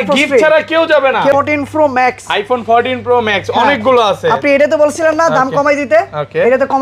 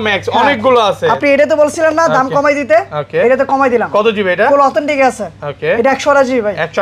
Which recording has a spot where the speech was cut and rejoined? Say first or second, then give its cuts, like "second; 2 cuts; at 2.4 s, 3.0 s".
first; 1 cut; at 1.3 s